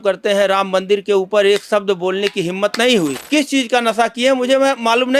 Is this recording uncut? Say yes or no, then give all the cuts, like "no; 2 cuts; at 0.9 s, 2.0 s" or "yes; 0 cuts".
no; 1 cut; at 3.2 s